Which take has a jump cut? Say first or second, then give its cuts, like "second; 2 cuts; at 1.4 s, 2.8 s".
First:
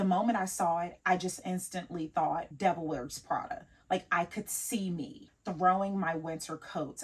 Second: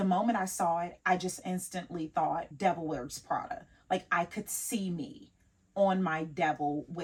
first; 1 cut; at 5.3 s